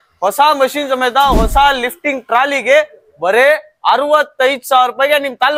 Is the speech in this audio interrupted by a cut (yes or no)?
no